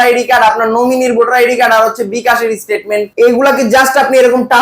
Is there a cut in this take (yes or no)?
yes